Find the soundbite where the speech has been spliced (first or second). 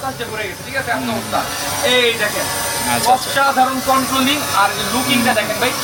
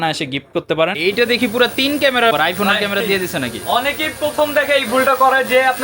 second